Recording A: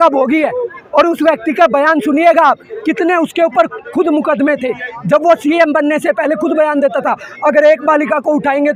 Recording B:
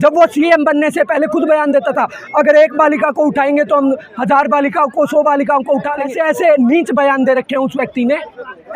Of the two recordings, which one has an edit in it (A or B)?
B